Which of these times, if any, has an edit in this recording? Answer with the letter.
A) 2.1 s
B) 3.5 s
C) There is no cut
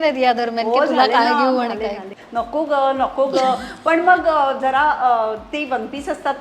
A